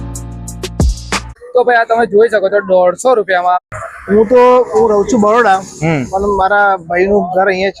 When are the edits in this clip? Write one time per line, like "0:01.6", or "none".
0:01.3
0:03.7